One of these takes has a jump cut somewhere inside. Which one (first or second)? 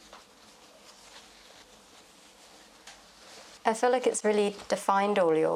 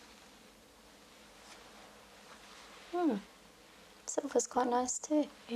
first